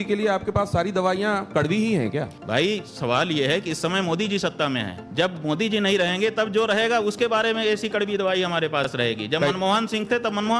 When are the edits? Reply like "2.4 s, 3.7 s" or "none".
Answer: 2.4 s, 5.0 s